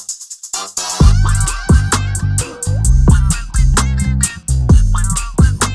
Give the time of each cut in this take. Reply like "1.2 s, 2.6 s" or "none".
none